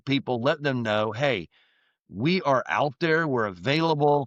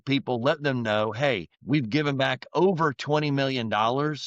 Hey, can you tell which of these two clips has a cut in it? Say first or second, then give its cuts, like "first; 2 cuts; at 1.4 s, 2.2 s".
second; 1 cut; at 1.5 s